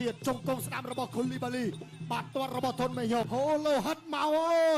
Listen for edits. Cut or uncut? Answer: cut